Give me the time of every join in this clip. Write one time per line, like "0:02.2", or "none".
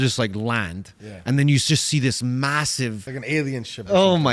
0:03.1